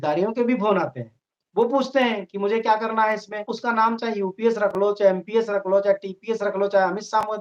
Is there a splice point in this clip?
yes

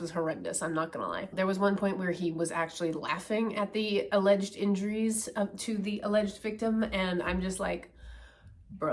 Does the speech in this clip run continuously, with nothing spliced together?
yes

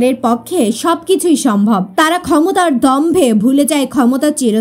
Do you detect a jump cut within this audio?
yes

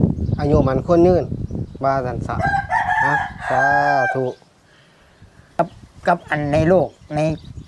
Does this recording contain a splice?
yes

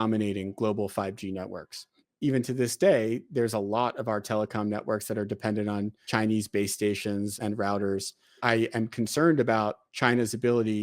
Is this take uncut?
no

